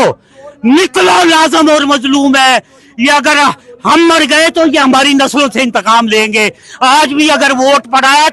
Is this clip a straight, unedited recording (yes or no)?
yes